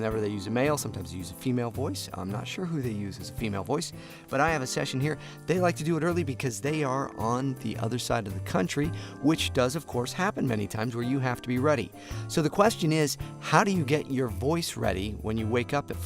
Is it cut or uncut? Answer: cut